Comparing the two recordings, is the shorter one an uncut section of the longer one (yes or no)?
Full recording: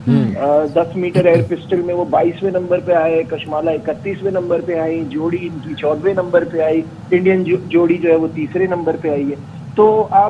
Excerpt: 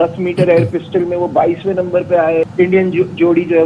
no